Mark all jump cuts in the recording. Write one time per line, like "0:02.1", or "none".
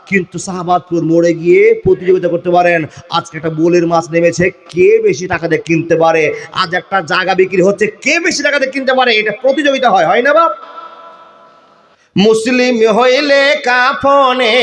none